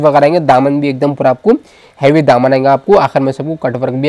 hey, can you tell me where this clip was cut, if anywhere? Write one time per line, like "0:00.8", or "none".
none